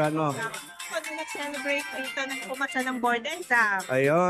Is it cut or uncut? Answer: uncut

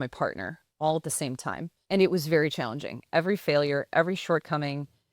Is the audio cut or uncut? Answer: cut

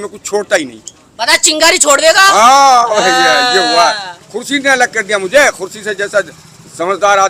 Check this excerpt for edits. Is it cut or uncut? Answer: uncut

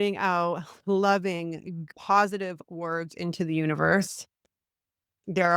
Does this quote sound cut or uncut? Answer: cut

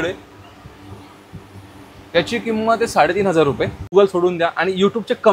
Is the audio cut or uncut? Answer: cut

